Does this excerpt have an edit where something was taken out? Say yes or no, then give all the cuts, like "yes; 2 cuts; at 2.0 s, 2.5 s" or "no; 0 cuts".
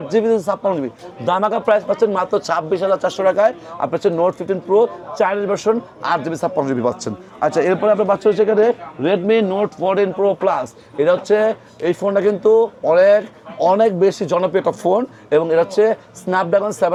no; 0 cuts